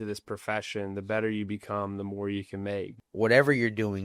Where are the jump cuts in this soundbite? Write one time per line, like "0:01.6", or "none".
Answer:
0:03.0

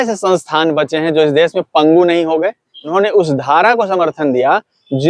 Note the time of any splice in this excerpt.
0:02.9

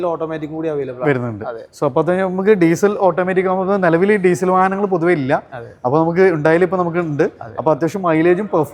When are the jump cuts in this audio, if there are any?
none

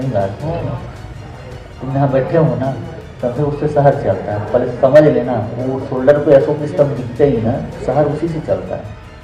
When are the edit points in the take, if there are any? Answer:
none

